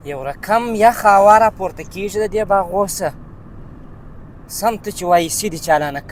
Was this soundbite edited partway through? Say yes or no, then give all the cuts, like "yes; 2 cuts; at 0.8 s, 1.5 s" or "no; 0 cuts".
no; 0 cuts